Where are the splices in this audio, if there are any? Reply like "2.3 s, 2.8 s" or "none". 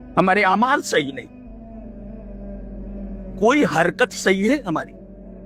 none